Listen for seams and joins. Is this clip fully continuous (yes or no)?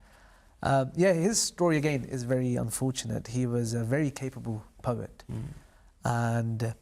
yes